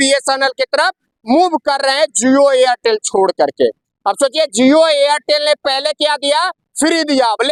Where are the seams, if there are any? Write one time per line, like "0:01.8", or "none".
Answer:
none